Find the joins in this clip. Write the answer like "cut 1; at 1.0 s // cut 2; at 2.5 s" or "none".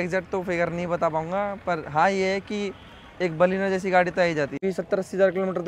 cut 1; at 4.6 s